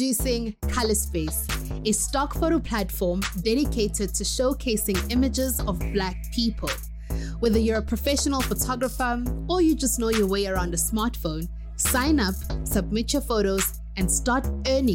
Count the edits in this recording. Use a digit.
0